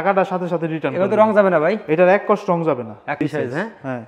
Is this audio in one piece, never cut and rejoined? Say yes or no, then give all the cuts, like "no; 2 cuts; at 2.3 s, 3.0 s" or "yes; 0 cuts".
no; 1 cut; at 3.2 s